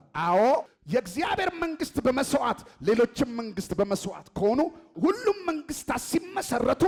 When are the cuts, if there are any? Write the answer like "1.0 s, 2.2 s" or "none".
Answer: none